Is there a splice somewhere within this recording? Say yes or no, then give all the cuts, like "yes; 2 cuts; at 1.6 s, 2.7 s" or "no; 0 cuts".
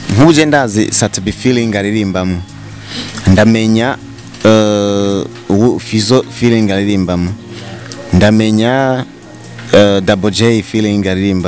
no; 0 cuts